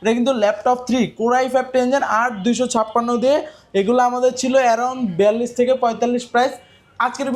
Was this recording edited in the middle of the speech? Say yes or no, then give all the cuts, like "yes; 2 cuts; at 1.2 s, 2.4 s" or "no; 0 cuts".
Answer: no; 0 cuts